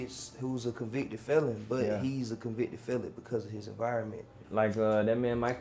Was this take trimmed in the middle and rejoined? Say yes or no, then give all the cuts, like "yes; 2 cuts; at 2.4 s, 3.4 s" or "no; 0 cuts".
yes; 1 cut; at 4.3 s